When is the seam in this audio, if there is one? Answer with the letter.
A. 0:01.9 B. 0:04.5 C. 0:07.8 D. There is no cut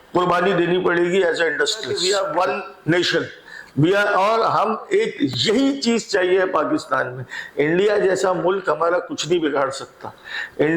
A